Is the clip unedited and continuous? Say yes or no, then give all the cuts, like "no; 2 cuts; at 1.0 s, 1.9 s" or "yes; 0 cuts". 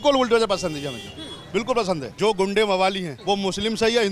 no; 2 cuts; at 2.1 s, 3.1 s